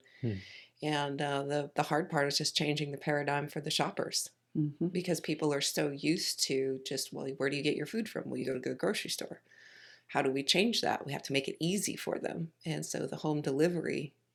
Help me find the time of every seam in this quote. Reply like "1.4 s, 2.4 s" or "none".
none